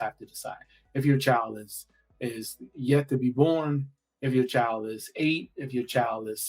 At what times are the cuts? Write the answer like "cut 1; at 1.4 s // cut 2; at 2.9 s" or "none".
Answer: none

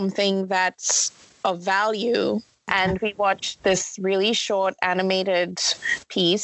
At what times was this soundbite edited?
cut 1; at 2.6 s

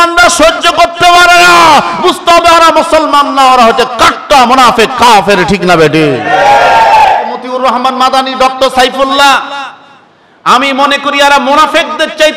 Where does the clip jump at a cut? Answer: cut 1; at 7.4 s

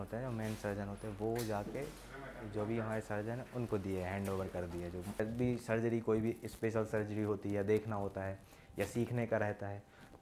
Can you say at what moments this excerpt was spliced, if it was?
cut 1; at 5.2 s

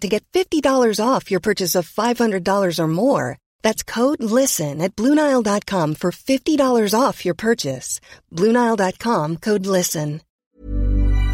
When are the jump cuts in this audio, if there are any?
cut 1; at 10.3 s

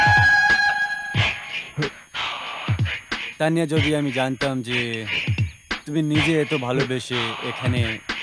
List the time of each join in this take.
none

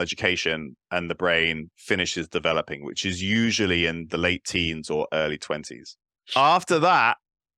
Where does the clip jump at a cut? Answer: cut 1; at 6.0 s

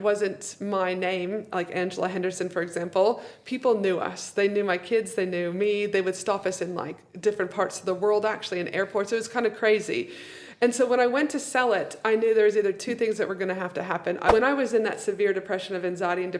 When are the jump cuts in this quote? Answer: cut 1; at 14.3 s

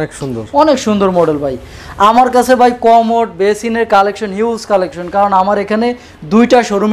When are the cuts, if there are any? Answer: none

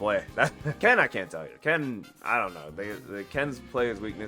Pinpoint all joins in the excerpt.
none

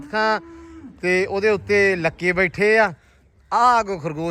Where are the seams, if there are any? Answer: none

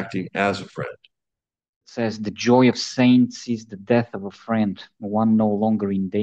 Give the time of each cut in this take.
cut 1; at 1.9 s

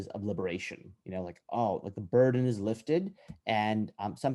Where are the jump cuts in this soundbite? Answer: none

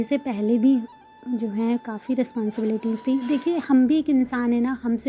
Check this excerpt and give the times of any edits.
none

